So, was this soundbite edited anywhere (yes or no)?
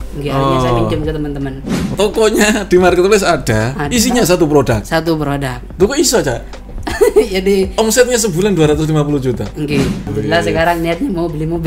yes